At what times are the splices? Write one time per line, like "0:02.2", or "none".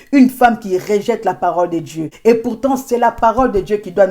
0:02.1